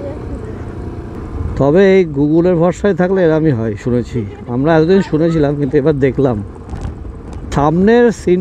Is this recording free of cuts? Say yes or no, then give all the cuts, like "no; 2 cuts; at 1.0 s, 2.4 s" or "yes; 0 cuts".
no; 2 cuts; at 1.2 s, 7.4 s